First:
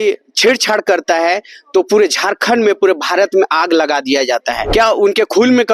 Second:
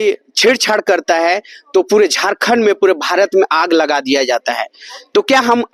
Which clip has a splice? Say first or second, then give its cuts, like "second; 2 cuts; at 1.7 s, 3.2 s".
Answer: first; 1 cut; at 4.6 s